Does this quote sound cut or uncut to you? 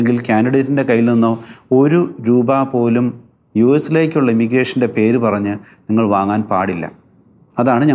uncut